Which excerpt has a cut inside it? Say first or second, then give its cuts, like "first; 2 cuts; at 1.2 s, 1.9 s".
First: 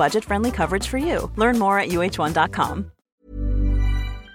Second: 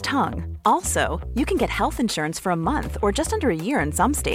first; 1 cut; at 3.1 s